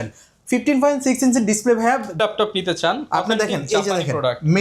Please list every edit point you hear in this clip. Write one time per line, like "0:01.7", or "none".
0:02.1